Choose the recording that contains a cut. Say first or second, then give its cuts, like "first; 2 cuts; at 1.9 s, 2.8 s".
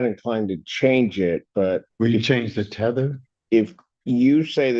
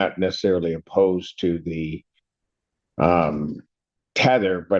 first; 1 cut; at 1.9 s